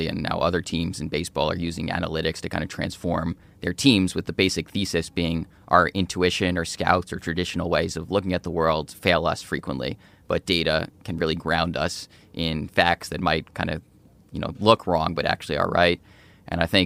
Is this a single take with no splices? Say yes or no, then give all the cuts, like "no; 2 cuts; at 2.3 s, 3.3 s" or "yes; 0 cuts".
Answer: yes; 0 cuts